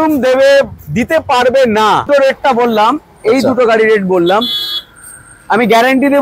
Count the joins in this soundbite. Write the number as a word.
one